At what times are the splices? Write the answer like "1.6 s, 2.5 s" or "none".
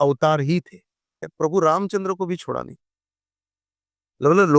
1.3 s